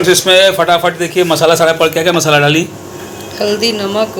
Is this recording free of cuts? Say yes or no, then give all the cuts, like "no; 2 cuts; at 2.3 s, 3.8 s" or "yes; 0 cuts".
yes; 0 cuts